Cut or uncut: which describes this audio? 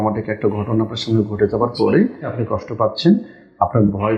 cut